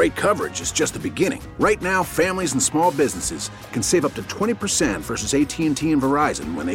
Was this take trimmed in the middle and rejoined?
no; 0 cuts

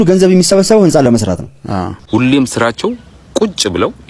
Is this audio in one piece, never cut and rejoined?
no; 1 cut; at 1.9 s

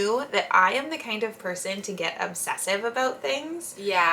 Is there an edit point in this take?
no; 0 cuts

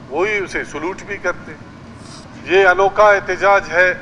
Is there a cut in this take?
yes; 1 cut; at 2.3 s

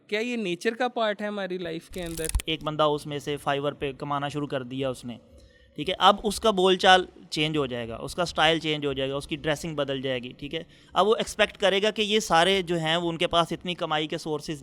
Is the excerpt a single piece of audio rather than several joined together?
no; 1 cut; at 2.4 s

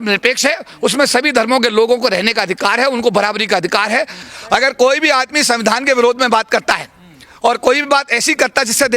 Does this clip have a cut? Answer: yes; 1 cut; at 4.2 s

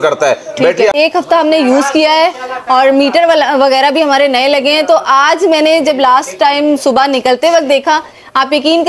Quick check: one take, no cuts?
no; 1 cut; at 0.9 s

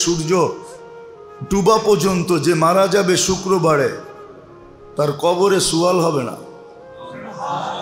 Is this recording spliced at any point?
no; 0 cuts

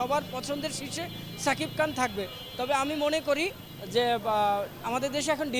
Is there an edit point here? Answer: no; 0 cuts

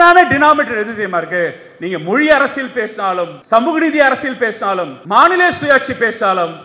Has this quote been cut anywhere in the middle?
yes; 2 cuts; at 3.4 s, 5.0 s

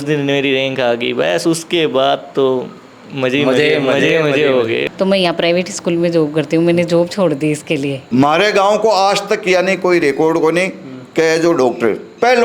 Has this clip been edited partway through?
yes; 2 cuts; at 4.9 s, 8.0 s

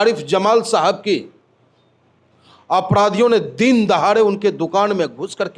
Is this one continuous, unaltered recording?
yes; 0 cuts

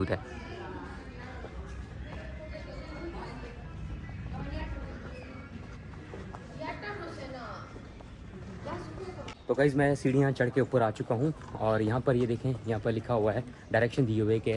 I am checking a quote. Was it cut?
no; 0 cuts

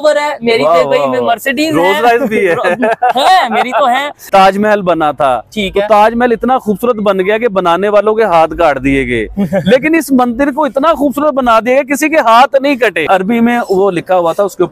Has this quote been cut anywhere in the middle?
yes; 2 cuts; at 4.1 s, 13.0 s

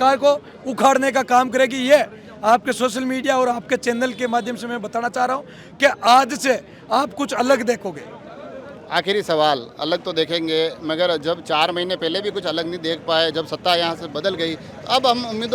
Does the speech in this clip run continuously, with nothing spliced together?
yes; 0 cuts

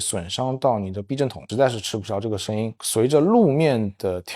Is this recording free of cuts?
no; 2 cuts; at 1.4 s, 2.8 s

